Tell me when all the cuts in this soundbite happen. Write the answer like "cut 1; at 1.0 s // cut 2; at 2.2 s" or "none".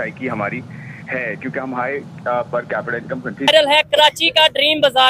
cut 1; at 3.5 s